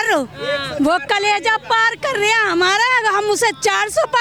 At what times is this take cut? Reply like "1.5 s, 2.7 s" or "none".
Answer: none